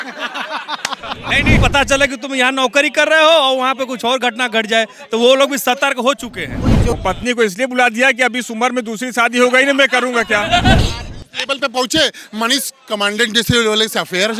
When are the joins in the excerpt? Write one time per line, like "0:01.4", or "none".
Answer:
0:01.6
0:06.9
0:10.8

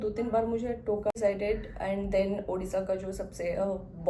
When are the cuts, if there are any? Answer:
0:01.1

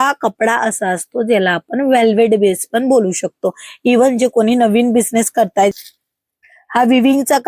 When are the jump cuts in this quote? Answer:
0:05.7

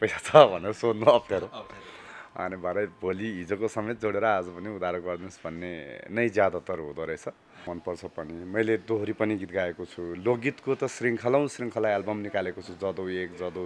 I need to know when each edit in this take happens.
0:07.7

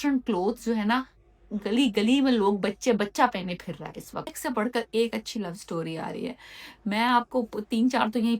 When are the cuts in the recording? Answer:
0:04.3

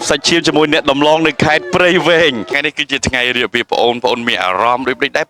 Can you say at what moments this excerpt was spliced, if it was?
0:02.5

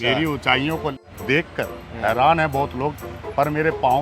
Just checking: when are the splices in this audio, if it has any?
0:01.0

